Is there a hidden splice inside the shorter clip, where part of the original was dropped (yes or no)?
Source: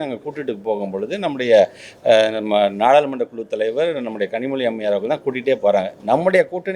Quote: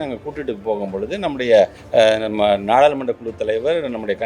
yes